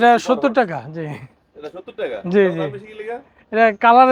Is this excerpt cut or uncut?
uncut